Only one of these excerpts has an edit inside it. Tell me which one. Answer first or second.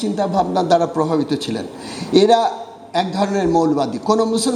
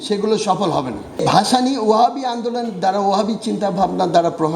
second